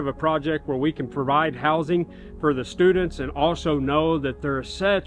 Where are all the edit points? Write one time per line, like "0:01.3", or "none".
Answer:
none